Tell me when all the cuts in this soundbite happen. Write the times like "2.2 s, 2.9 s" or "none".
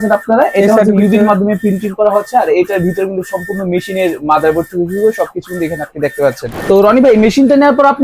6.5 s